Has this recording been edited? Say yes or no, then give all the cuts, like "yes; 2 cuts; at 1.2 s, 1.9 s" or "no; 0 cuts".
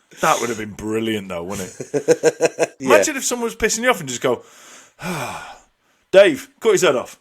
yes; 1 cut; at 2.7 s